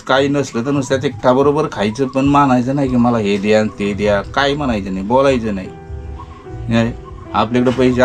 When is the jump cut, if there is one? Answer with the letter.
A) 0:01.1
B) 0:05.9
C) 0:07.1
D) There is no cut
D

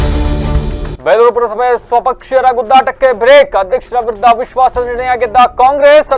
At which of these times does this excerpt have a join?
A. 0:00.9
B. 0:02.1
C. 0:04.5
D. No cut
D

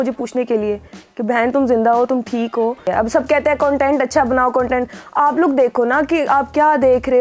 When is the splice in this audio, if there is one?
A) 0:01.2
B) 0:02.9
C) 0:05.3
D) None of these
B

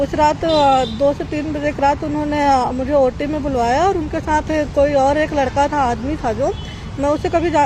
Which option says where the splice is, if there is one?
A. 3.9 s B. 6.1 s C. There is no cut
C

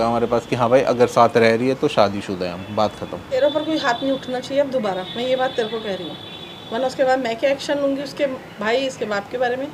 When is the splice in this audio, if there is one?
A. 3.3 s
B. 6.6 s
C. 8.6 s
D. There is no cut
A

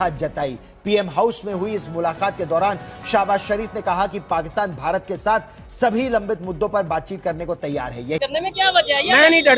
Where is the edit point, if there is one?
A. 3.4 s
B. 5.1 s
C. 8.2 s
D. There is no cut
C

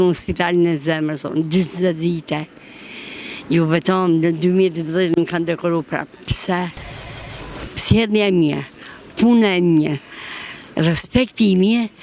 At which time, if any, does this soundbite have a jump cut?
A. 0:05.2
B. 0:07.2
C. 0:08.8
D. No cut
B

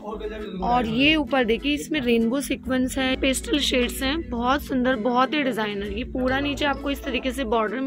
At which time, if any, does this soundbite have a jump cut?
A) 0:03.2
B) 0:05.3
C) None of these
A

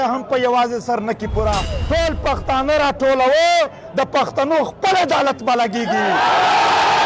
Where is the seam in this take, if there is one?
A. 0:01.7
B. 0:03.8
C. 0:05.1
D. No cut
A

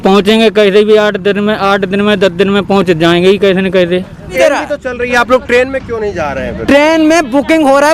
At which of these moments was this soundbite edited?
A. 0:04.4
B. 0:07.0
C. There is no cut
A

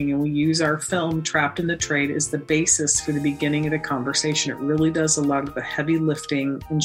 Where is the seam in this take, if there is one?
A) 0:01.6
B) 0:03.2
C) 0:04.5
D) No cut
D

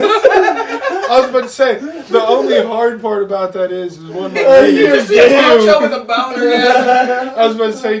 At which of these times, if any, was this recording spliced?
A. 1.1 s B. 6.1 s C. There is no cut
C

